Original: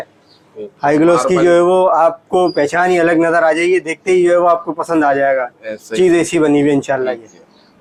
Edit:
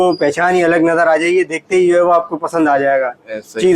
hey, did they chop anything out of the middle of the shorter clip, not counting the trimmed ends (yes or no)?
no